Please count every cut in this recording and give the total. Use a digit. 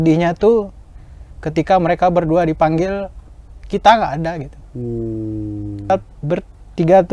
1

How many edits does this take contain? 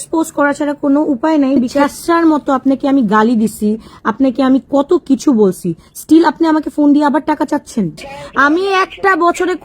2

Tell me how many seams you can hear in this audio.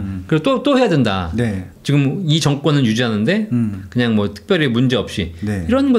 1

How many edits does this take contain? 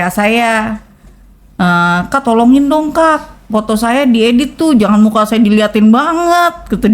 0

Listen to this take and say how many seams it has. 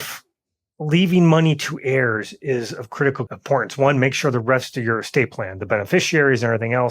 1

